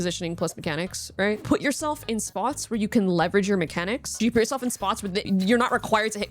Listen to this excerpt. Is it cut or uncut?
cut